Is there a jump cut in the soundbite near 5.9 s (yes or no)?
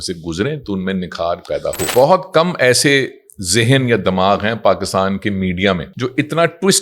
yes